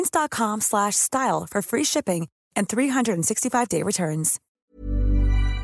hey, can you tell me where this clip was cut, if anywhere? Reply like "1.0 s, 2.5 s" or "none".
4.4 s